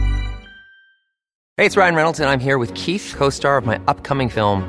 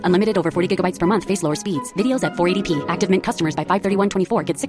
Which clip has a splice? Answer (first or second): first